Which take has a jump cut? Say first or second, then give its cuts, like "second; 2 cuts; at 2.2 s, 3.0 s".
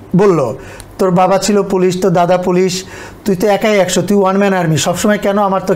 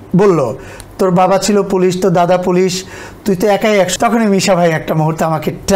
second; 1 cut; at 3.9 s